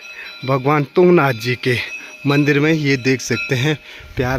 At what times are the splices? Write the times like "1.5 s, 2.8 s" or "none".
none